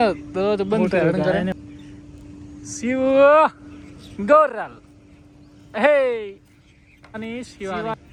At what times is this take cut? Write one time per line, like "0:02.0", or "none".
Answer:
none